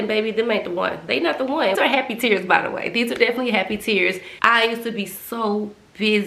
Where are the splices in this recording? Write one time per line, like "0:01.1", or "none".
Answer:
0:01.8
0:04.3